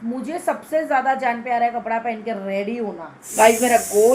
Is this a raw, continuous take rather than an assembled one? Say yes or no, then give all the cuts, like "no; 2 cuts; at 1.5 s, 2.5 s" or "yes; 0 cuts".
no; 1 cut; at 3.1 s